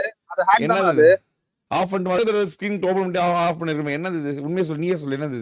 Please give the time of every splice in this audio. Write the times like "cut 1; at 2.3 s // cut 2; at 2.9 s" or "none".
cut 1; at 2.2 s